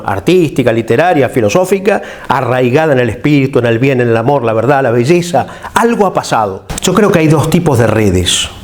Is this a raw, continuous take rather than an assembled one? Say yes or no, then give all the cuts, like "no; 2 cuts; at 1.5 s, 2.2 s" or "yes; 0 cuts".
no; 1 cut; at 6.7 s